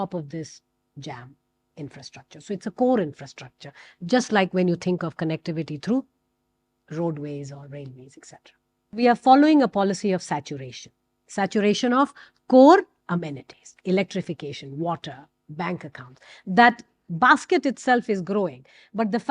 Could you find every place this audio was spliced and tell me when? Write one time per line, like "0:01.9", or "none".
0:08.9
0:13.0